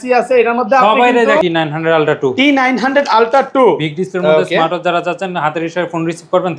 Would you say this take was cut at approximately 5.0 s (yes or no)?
no